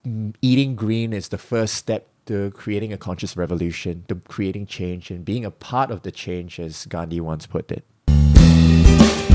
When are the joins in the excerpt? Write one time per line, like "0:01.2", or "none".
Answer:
0:08.0